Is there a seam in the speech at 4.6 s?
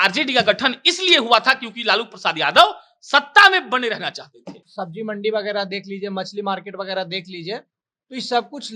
yes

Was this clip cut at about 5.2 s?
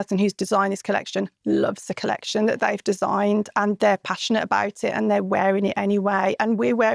no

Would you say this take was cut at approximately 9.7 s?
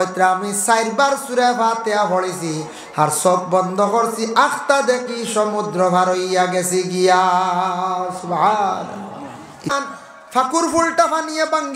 yes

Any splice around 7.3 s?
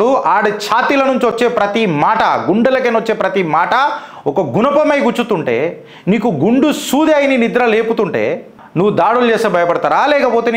no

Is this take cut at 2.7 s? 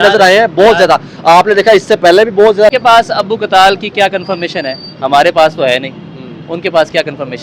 yes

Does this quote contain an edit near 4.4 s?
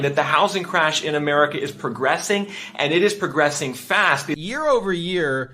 yes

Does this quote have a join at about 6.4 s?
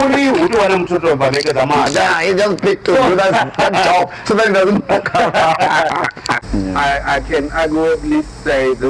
yes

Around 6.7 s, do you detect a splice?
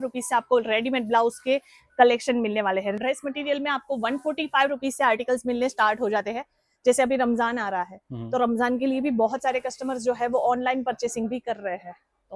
no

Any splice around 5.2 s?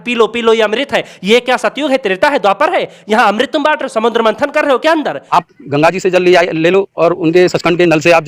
yes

